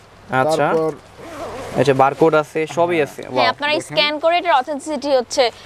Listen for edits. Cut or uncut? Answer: uncut